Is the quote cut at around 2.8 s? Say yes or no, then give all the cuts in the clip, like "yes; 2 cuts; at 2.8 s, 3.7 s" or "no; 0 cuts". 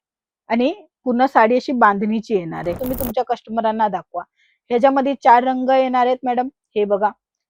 yes; 1 cut; at 2.8 s